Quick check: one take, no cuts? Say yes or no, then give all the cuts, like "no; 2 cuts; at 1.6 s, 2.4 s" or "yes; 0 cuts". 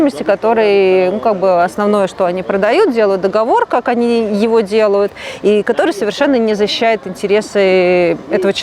yes; 0 cuts